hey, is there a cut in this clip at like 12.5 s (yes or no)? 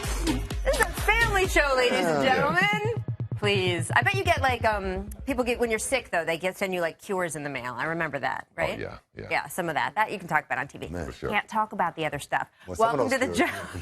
no